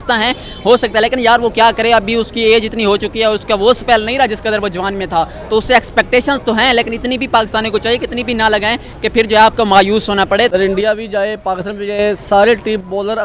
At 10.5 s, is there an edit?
yes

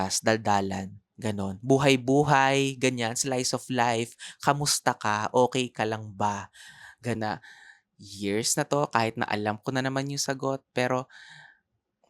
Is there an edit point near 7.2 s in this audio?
yes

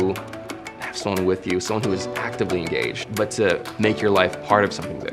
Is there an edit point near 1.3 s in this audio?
no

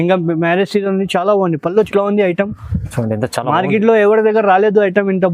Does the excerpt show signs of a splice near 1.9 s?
yes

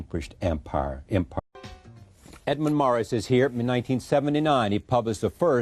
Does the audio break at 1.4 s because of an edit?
no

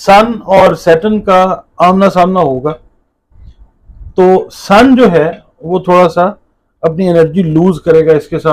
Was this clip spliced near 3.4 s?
no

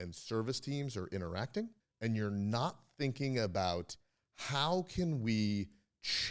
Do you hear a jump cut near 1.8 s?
yes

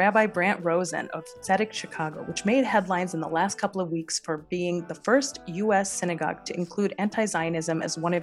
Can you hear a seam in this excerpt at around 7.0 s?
no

